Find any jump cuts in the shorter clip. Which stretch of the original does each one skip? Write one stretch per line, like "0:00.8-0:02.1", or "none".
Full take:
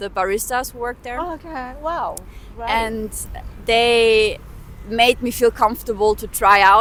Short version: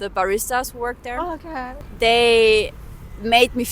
0:01.7-0:03.4